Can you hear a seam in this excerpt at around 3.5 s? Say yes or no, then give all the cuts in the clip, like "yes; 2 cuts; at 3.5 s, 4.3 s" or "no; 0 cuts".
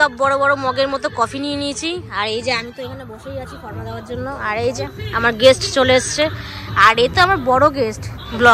no; 0 cuts